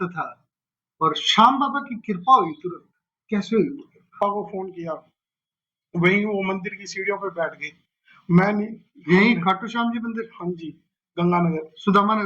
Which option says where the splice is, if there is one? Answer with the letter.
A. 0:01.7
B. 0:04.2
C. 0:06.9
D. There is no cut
B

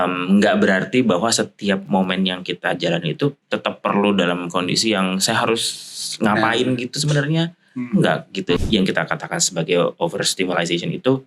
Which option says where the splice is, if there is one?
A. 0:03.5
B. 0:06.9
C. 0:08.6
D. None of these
C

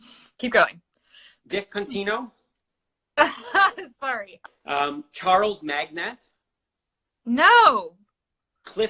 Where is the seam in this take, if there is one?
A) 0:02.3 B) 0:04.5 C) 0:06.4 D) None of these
B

